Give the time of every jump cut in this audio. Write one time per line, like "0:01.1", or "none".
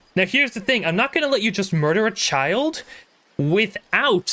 none